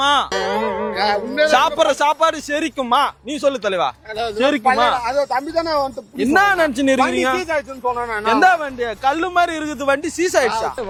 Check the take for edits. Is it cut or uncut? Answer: uncut